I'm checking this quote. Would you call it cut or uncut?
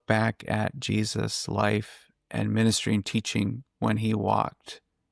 uncut